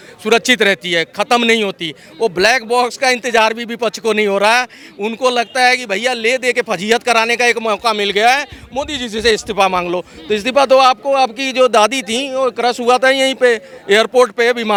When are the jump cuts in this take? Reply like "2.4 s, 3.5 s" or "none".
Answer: none